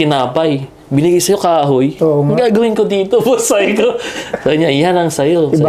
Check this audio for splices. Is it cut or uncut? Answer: uncut